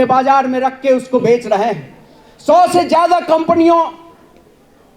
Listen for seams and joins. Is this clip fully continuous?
yes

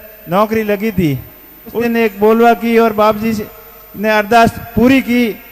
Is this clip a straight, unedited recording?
no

